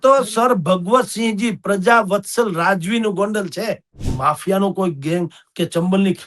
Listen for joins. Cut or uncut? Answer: cut